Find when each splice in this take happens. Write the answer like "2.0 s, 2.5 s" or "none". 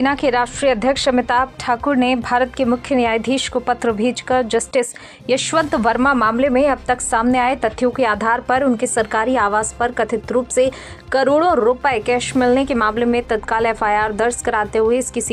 none